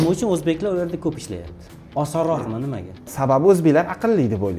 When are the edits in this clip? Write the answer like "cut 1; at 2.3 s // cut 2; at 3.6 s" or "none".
cut 1; at 3.1 s